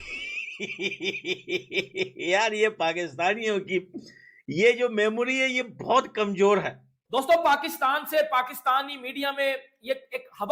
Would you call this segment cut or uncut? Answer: cut